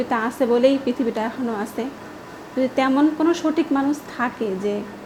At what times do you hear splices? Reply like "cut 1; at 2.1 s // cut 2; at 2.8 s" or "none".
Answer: none